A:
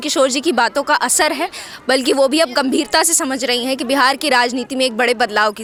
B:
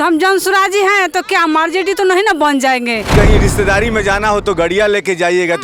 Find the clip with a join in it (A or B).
B